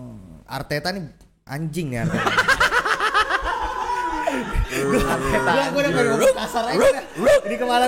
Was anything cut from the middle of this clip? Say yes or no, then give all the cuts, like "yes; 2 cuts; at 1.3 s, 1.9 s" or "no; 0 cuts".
no; 0 cuts